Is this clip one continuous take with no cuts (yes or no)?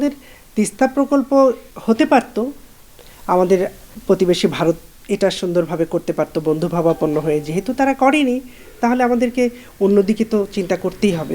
no